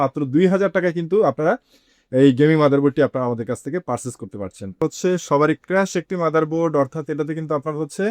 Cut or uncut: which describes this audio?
cut